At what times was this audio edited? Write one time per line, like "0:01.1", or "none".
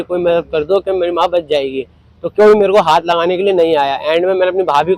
none